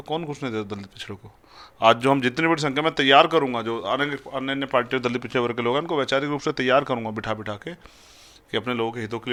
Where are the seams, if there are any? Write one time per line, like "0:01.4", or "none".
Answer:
none